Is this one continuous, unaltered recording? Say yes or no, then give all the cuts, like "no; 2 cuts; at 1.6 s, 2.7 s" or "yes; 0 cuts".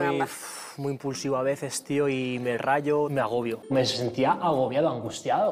yes; 0 cuts